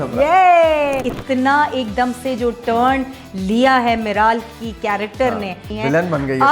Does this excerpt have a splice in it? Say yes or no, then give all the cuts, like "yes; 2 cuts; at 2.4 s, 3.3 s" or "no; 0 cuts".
yes; 2 cuts; at 1.0 s, 5.7 s